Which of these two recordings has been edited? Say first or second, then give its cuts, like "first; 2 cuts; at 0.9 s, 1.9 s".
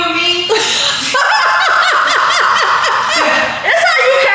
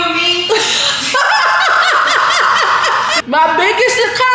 second; 1 cut; at 3.2 s